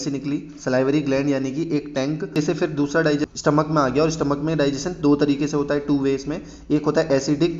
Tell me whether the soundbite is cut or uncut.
cut